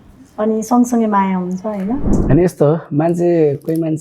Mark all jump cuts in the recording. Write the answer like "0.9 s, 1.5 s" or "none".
2.2 s